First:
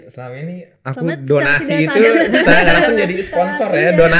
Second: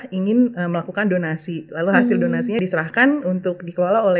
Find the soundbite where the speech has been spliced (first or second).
second